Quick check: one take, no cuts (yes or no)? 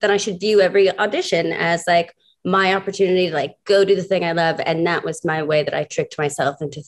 yes